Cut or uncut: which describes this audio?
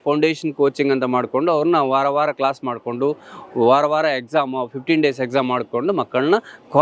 uncut